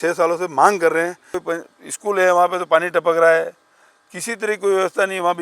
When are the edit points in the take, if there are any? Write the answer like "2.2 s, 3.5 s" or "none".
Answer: 1.3 s